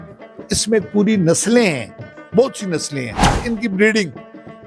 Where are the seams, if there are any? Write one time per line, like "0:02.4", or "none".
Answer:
0:03.4